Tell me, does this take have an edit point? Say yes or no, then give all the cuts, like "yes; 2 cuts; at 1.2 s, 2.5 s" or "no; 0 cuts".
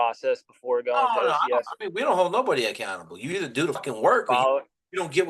yes; 1 cut; at 3.8 s